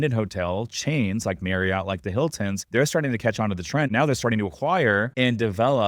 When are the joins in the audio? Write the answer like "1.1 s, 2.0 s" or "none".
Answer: 2.6 s, 3.9 s, 5.1 s